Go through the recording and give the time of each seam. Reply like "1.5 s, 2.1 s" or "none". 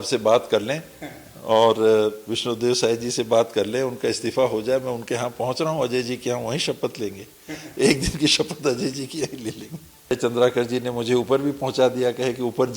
10.1 s